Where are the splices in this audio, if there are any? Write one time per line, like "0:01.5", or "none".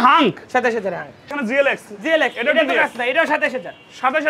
0:01.3